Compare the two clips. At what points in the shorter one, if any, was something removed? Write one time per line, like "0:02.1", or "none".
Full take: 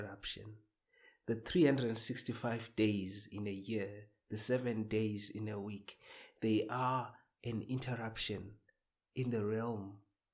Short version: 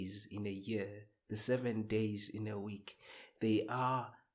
none